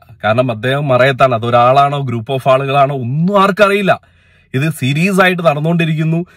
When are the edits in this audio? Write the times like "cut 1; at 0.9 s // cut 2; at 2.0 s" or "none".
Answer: none